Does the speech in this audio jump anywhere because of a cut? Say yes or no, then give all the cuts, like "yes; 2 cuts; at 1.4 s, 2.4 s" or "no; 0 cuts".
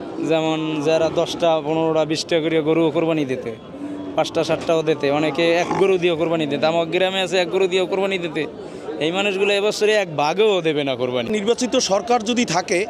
yes; 1 cut; at 11.2 s